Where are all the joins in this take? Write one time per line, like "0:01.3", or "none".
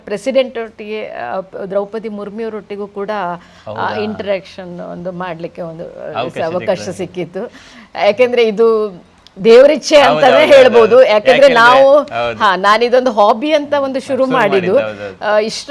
none